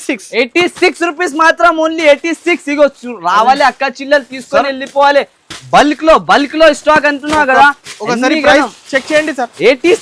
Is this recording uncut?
yes; 0 cuts

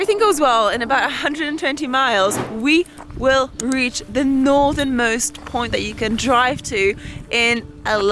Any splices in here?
no; 0 cuts

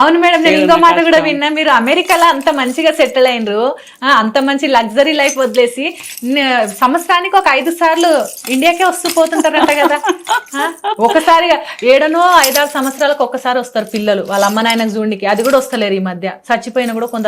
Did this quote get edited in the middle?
no; 0 cuts

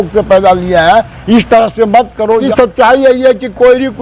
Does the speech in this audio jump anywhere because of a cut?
yes; 1 cut; at 2.5 s

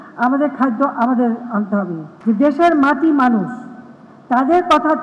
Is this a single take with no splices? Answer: no; 1 cut; at 2.1 s

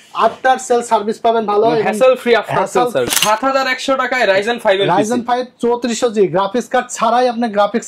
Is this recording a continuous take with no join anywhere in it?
no; 1 cut; at 3.1 s

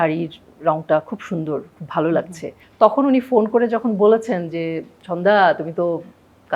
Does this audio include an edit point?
yes; 1 cut; at 2.6 s

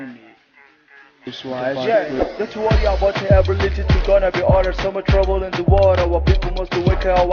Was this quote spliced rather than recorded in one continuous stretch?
yes; 1 cut; at 1.3 s

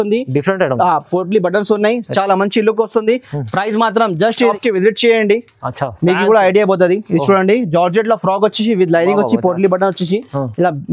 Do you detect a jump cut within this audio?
yes; 1 cut; at 4.5 s

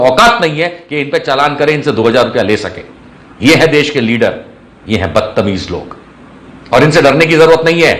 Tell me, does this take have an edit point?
no; 0 cuts

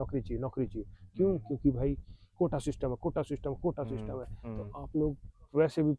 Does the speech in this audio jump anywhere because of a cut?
no; 0 cuts

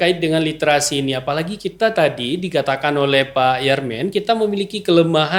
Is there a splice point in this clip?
no; 0 cuts

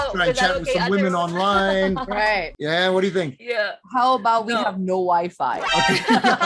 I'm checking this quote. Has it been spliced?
no; 0 cuts

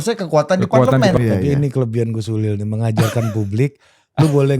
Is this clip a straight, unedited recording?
no; 1 cut; at 1.2 s

